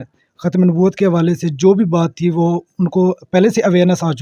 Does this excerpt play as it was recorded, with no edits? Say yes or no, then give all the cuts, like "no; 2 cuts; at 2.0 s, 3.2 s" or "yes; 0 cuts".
yes; 0 cuts